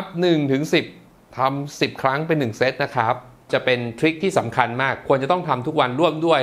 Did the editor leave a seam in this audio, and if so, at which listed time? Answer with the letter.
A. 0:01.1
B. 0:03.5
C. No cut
B